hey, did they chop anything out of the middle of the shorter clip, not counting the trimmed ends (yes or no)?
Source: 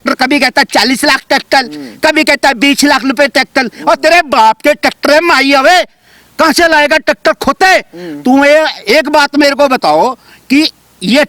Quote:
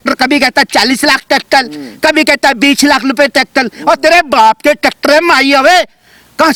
no